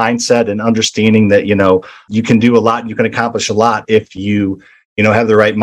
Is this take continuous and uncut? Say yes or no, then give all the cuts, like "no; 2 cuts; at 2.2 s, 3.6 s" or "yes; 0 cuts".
yes; 0 cuts